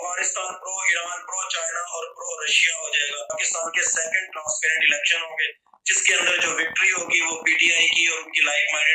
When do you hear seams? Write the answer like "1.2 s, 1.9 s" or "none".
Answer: 3.3 s